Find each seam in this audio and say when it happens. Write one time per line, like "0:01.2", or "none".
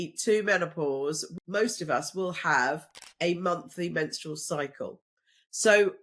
0:01.3